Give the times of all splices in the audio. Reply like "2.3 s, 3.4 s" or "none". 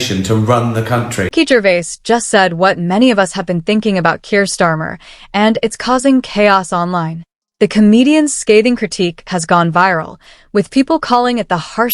1.3 s